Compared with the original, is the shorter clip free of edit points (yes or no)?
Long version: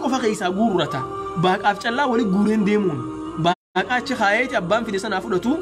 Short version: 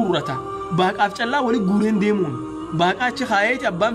no